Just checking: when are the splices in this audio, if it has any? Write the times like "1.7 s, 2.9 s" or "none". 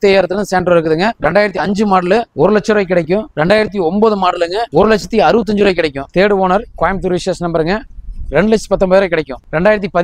1.1 s, 2.3 s, 3.3 s, 4.6 s, 6.0 s